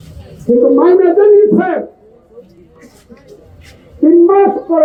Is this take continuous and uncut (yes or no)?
yes